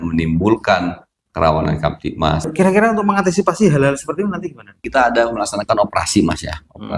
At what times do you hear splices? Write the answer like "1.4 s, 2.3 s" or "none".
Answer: 2.5 s, 4.9 s